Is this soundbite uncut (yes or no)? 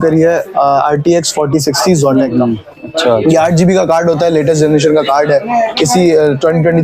yes